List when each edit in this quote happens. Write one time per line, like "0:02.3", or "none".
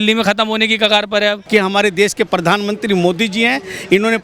0:01.4